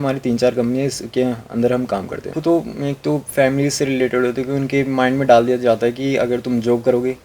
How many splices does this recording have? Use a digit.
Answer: 1